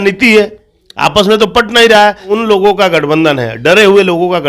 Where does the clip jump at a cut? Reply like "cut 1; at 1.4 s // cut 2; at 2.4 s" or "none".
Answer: cut 1; at 2.2 s